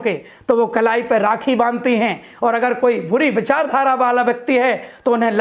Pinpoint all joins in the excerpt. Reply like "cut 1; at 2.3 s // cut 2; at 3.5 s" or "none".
none